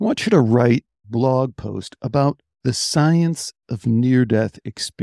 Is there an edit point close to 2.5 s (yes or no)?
yes